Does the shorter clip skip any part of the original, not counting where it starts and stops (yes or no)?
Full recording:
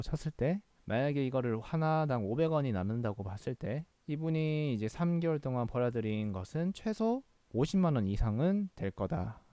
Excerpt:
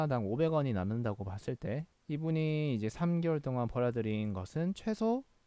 no